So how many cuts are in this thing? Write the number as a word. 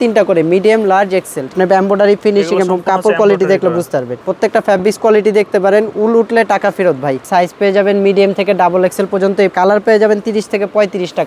four